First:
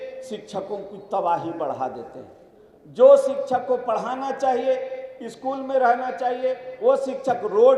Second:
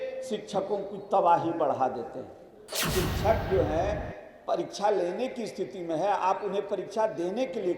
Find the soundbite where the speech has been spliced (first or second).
second